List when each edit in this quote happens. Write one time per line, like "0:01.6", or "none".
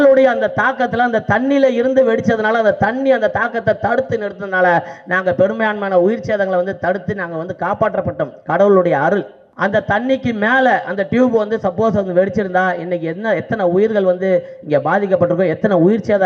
0:09.4